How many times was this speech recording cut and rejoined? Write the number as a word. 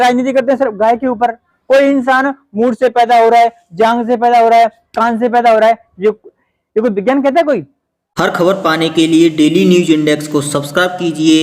two